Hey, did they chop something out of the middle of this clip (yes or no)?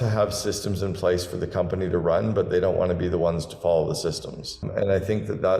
yes